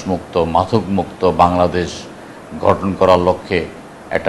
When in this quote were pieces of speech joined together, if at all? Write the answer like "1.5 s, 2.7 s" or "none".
none